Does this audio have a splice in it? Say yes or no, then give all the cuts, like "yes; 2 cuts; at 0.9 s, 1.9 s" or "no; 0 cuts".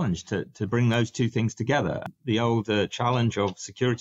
yes; 1 cut; at 2.0 s